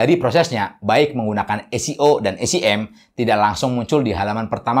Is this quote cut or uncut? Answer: uncut